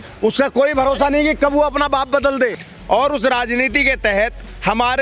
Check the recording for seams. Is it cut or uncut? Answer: cut